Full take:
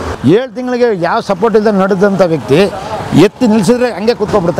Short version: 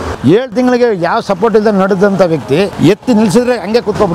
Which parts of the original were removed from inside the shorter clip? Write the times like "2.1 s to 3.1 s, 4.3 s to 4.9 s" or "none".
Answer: 2.7 s to 3.1 s

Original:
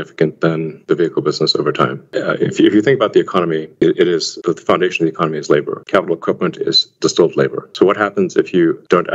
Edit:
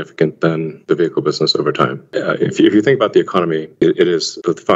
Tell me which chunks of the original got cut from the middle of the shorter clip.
none

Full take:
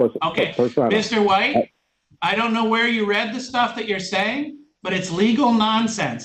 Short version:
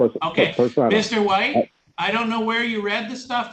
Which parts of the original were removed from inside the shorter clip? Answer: 1.8 s to 2.1 s

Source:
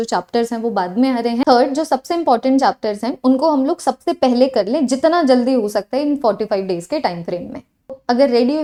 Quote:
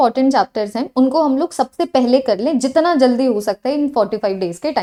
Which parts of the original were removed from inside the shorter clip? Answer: none

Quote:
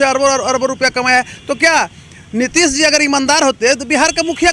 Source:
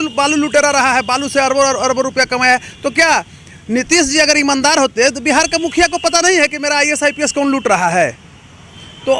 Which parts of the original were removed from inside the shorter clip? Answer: none

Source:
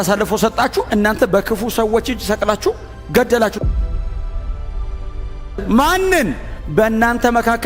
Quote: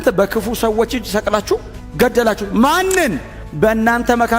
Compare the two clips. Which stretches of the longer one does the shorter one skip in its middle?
3.6 s to 5.6 s

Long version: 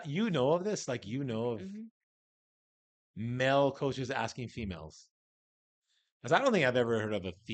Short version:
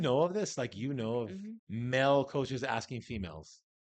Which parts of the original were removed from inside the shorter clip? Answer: 1.9 s to 3.0 s

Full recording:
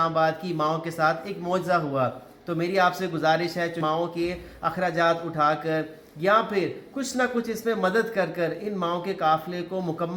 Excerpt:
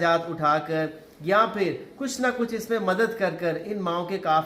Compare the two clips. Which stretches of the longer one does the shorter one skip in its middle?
none

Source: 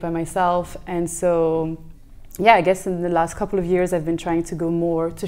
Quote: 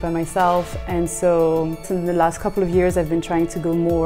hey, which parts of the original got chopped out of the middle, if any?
1.9 s to 2.9 s

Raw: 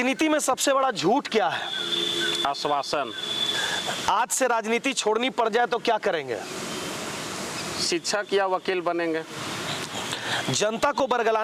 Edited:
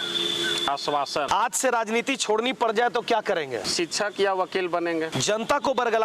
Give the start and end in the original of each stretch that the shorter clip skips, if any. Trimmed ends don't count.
3.0 s to 4.0 s, 6.4 s to 7.8 s, 9.3 s to 10.5 s

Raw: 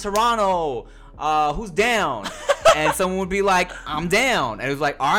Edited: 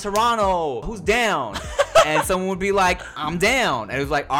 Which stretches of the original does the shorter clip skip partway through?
0.9 s to 1.6 s

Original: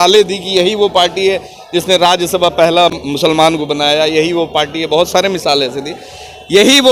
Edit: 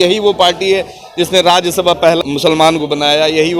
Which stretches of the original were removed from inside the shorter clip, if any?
2.7 s to 3.0 s

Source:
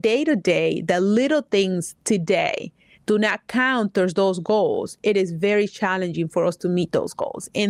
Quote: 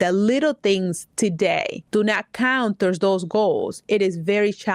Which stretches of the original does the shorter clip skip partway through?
2.7 s to 2.9 s

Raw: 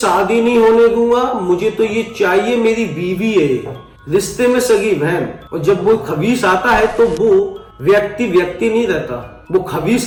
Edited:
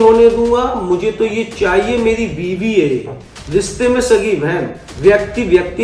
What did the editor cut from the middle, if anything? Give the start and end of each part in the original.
5.4 s to 7.7 s

